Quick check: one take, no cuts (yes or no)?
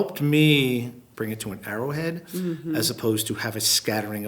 no